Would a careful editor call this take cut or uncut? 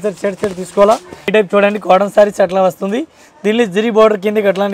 cut